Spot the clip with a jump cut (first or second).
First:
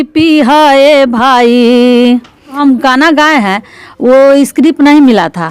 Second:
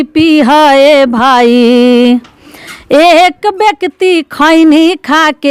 first